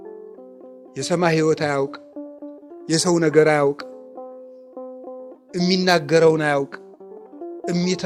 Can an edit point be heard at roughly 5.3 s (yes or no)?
no